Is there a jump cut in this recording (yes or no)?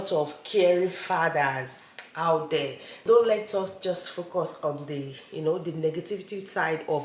yes